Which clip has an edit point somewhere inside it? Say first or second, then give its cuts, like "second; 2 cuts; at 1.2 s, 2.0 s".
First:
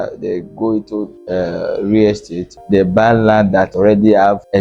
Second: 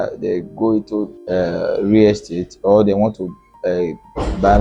first; 2 cuts; at 2.6 s, 3.7 s